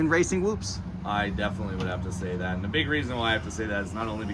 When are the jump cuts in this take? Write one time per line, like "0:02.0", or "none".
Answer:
none